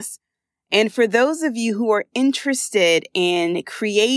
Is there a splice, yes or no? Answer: no